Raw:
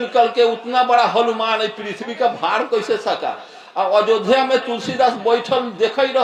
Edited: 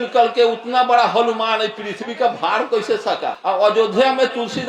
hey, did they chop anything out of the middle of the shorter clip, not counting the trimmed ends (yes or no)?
yes